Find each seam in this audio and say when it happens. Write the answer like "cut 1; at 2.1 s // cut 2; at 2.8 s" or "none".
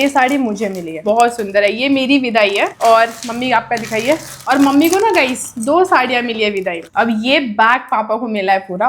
cut 1; at 1.0 s // cut 2; at 2.7 s // cut 3; at 6.8 s